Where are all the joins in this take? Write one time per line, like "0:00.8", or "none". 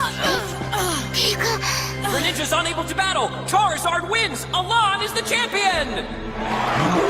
0:01.1